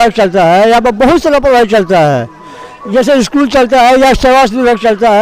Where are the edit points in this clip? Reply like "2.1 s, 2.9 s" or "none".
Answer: none